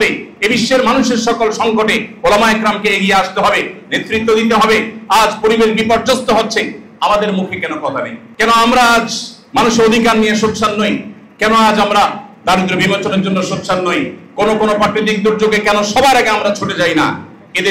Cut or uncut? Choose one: cut